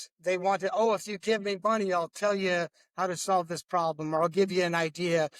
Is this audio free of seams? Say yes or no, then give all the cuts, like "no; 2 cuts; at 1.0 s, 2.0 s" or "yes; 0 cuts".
yes; 0 cuts